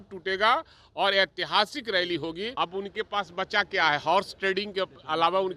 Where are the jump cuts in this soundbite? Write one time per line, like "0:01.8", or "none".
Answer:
0:02.5